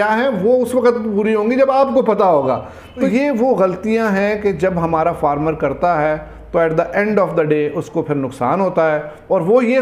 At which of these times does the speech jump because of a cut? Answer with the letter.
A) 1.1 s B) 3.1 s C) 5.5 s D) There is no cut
B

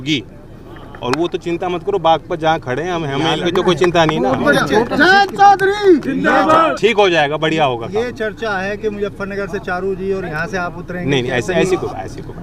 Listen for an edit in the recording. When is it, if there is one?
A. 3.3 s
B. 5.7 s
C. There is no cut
A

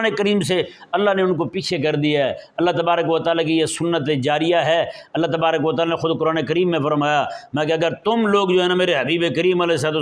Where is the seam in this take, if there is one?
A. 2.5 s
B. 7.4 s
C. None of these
C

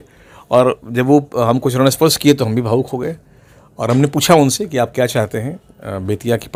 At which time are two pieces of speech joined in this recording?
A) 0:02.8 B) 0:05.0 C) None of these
C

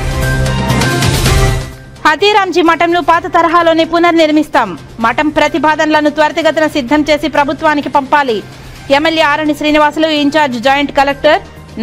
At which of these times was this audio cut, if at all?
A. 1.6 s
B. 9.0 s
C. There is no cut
A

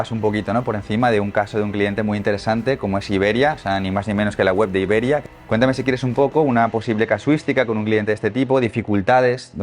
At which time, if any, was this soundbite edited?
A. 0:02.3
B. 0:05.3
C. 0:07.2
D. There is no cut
B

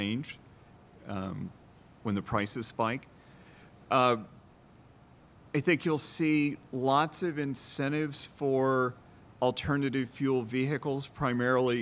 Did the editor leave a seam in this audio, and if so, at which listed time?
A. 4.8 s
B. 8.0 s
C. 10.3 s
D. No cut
D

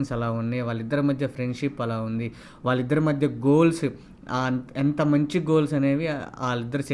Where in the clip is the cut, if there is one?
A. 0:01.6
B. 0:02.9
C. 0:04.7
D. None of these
D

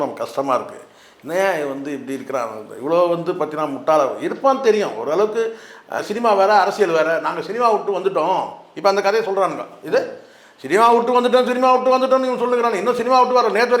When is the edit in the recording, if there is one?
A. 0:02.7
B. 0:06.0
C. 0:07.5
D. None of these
B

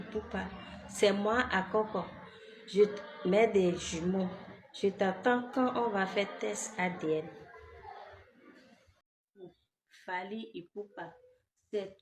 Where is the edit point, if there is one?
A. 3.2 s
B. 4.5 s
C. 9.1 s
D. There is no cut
C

